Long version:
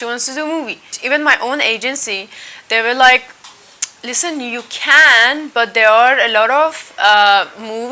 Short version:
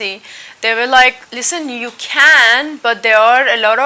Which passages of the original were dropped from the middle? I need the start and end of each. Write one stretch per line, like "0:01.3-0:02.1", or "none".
0:03.4-0:04.0